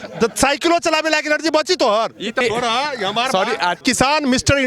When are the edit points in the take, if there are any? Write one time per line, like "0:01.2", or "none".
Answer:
0:02.4
0:03.8